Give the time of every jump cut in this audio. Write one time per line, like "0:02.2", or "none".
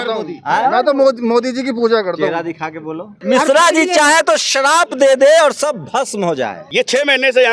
0:03.2
0:06.6